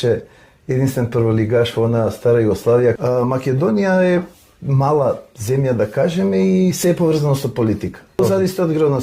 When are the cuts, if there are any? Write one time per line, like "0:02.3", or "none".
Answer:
0:03.0
0:08.2